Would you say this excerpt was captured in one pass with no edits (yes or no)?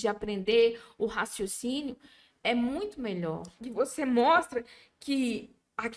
no